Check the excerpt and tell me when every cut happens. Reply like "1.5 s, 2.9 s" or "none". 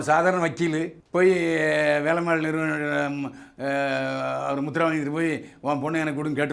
1.0 s